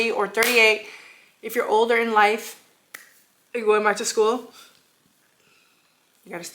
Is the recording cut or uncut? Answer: uncut